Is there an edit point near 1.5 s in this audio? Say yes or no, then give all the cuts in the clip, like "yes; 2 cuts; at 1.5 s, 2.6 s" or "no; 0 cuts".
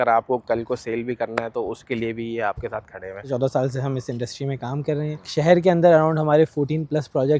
no; 2 cuts; at 3.2 s, 5.3 s